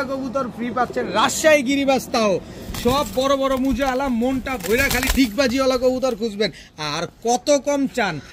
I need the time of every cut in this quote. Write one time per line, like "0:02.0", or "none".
none